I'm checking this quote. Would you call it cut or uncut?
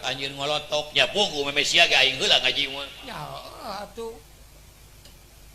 uncut